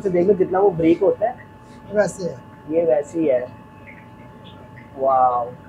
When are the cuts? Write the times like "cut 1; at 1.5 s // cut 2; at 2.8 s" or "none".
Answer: none